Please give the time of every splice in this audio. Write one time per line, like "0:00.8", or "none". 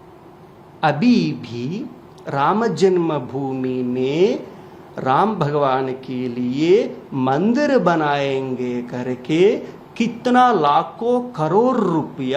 none